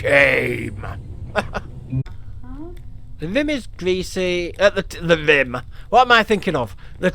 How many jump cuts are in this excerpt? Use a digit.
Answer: 1